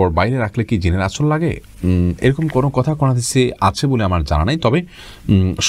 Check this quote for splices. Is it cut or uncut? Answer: uncut